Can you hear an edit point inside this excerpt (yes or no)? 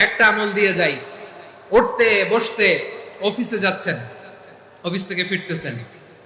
no